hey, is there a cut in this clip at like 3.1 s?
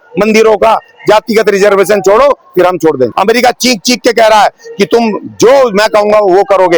yes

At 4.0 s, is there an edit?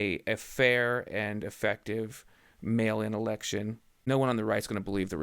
yes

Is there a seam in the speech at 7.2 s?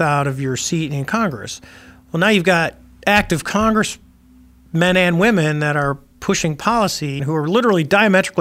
yes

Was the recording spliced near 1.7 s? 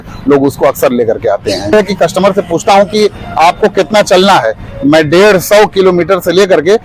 yes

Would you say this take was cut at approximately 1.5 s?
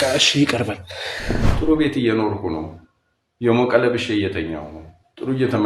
yes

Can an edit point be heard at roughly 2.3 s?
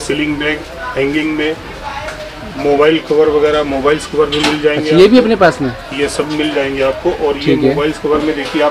no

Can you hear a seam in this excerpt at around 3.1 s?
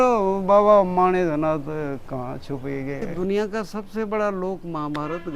yes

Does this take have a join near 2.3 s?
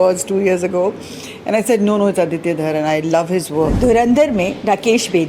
no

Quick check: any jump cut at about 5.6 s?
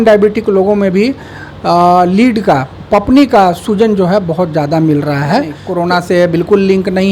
yes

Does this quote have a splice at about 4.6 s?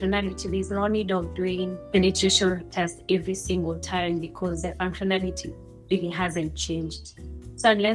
no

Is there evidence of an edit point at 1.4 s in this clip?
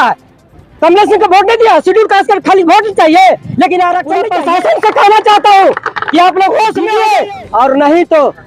no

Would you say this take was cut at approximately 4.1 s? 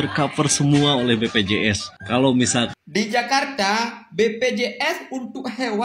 no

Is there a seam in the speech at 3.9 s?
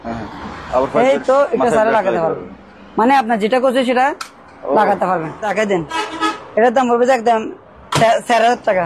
no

